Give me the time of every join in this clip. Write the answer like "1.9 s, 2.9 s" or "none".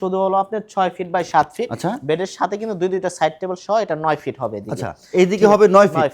none